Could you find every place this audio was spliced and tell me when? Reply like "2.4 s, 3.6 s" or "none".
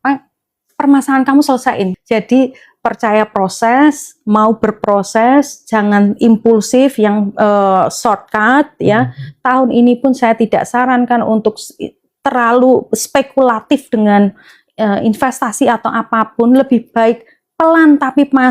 1.9 s

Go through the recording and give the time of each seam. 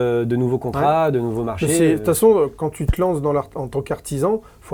none

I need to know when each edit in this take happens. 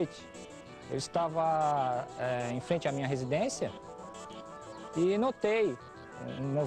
0.9 s

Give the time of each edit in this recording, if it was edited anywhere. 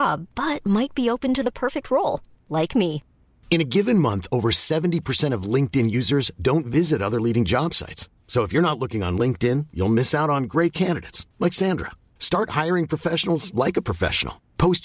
none

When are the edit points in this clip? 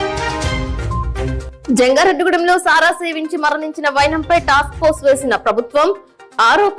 1.5 s

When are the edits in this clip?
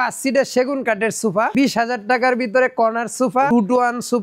1.5 s, 3.5 s

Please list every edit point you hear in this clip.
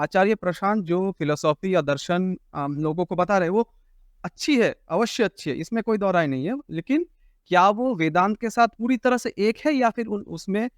8.8 s

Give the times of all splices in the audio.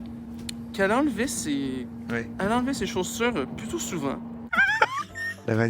2.3 s, 4.8 s

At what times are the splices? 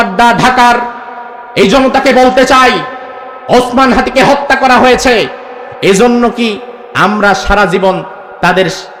none

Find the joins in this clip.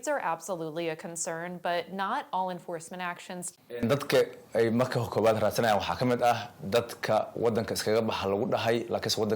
3.8 s

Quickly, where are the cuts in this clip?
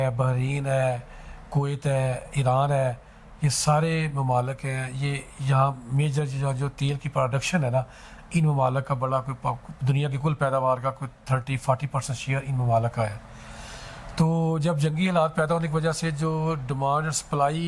none

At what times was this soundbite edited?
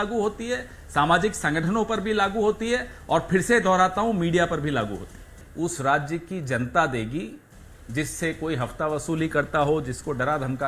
5.3 s

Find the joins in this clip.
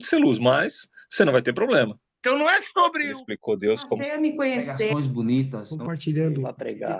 2.1 s

